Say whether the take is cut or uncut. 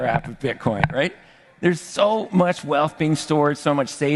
uncut